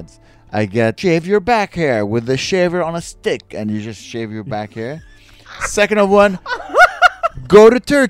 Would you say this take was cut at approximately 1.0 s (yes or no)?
yes